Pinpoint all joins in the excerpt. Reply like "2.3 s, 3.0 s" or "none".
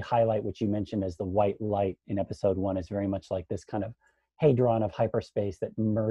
none